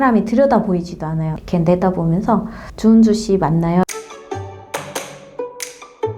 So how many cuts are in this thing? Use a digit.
2